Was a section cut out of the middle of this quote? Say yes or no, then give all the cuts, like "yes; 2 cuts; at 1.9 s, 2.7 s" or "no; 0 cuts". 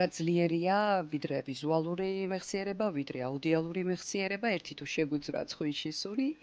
no; 0 cuts